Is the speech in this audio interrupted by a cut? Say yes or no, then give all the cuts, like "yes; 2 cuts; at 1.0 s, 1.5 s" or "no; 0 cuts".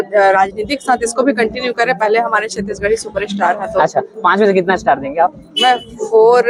no; 0 cuts